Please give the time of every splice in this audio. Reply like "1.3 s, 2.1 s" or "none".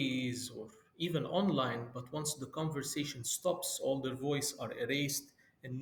none

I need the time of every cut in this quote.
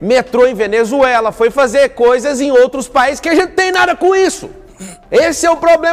none

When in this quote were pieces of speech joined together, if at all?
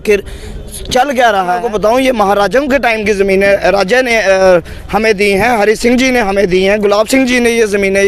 1.6 s

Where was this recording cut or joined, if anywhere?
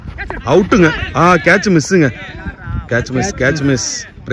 none

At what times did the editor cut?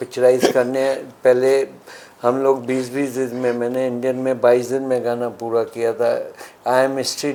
none

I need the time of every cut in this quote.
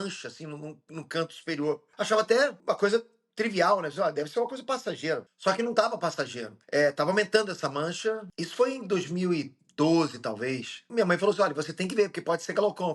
none

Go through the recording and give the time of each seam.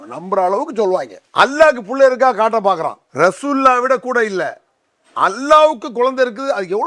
1.2 s, 3.0 s

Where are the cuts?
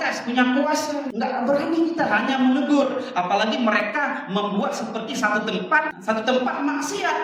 1.1 s, 6.0 s

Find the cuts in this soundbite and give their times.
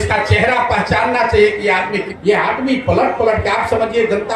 2.1 s

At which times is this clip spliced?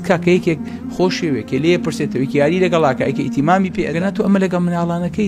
3.8 s

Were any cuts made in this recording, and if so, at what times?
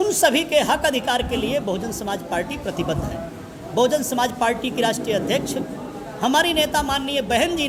none

